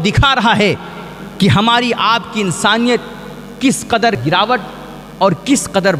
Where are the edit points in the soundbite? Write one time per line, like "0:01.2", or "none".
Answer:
none